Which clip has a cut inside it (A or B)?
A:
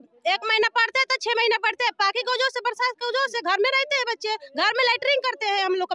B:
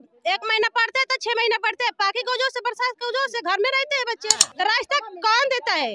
B